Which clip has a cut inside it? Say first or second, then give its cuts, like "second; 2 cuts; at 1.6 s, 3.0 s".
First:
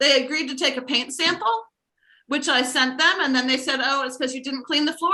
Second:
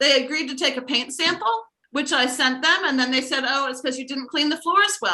second; 1 cut; at 1.8 s